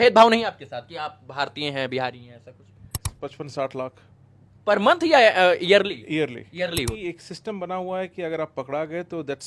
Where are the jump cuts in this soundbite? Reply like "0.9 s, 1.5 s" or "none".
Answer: 3.1 s, 7.0 s